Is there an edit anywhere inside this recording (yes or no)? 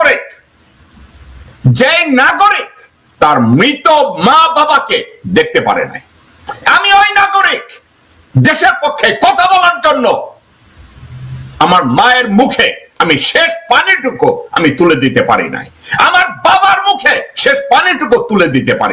no